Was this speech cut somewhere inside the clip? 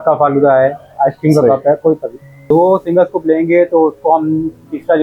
yes; 1 cut; at 2.5 s

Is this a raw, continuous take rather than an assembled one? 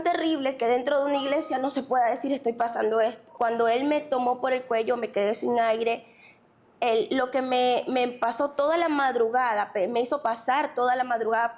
no; 1 cut; at 3.2 s

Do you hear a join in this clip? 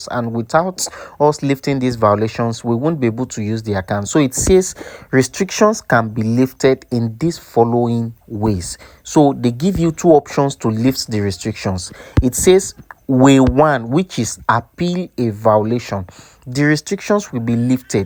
no; 0 cuts

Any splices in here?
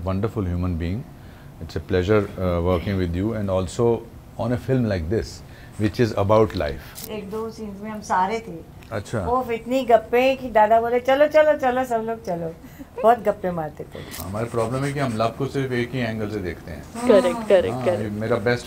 yes; 2 cuts; at 7.0 s, 14.1 s

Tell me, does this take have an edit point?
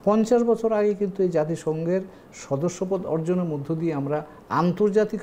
no; 0 cuts

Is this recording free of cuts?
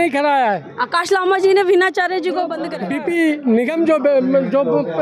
no; 1 cut; at 2.6 s

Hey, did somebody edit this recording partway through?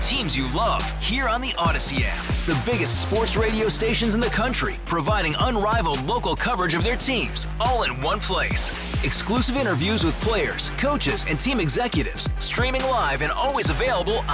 no; 0 cuts

